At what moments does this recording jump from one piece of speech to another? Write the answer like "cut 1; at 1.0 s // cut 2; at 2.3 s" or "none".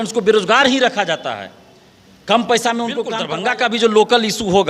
cut 1; at 3.2 s